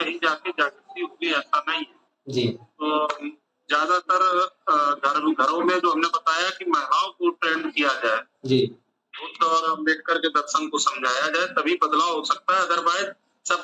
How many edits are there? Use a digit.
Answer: 0